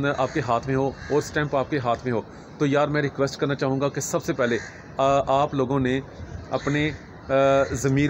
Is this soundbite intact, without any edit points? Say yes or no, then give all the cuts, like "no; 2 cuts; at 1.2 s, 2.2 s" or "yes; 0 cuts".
yes; 0 cuts